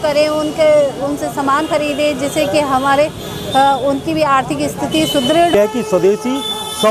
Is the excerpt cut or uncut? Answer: cut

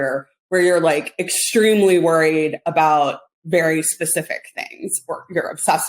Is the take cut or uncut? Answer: uncut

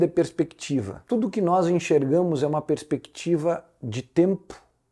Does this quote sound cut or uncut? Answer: cut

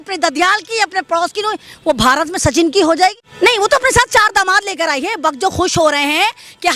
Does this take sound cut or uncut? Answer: cut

